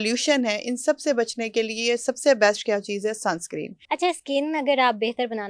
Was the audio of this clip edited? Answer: yes; 1 cut; at 3.7 s

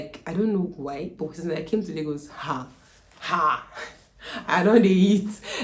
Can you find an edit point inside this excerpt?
no; 0 cuts

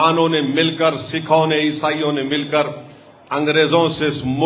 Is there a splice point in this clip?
no; 0 cuts

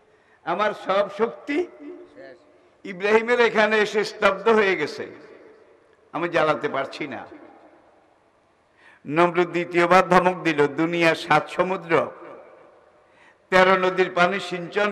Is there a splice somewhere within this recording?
no; 0 cuts

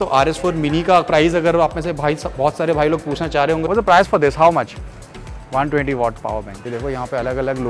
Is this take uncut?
no; 2 cuts; at 3.7 s, 6.6 s

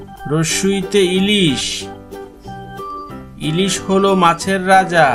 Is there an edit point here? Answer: no; 0 cuts

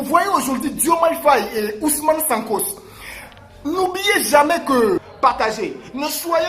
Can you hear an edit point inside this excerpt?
yes; 1 cut; at 5.1 s

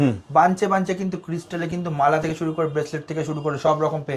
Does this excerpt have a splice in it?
no; 0 cuts

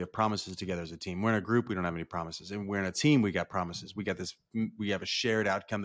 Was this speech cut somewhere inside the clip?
no; 0 cuts

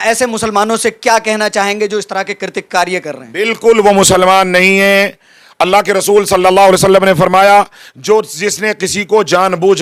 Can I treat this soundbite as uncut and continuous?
yes; 0 cuts

